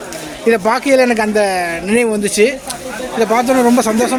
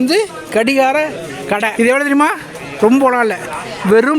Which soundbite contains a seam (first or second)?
second